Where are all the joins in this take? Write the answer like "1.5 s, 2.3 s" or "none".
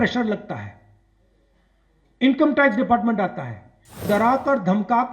4.0 s